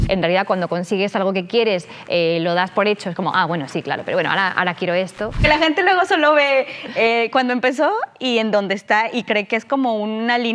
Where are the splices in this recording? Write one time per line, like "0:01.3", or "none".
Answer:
0:05.5